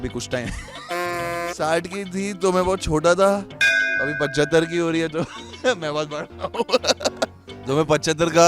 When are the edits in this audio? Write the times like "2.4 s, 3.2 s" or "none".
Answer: 7.5 s